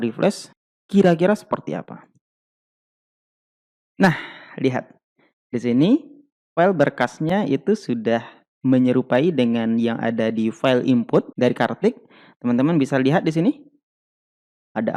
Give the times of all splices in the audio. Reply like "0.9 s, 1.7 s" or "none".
none